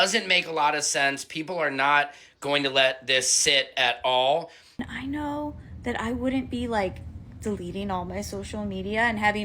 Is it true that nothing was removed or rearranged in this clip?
no; 1 cut; at 4.9 s

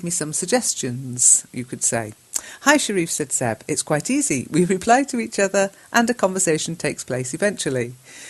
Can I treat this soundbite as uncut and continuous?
yes; 0 cuts

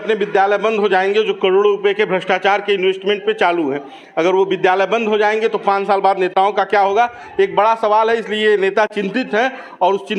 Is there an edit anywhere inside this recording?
no; 0 cuts

